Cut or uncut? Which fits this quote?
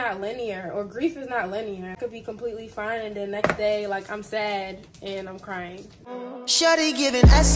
cut